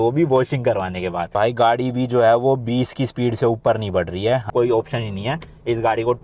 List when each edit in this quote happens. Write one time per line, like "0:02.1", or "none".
0:01.3
0:04.5